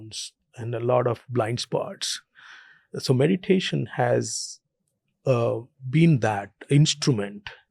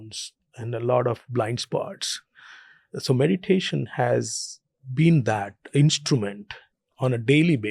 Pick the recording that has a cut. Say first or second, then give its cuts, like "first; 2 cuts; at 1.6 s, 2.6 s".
second; 1 cut; at 4.8 s